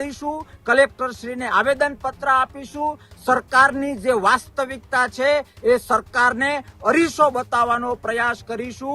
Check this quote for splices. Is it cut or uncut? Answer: uncut